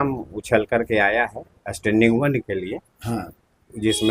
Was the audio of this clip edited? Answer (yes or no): no